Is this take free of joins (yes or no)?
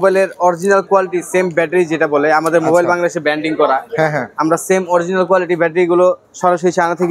yes